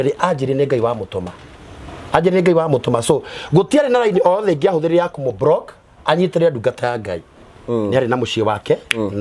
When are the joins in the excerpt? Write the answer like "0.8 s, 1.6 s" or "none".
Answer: 7.6 s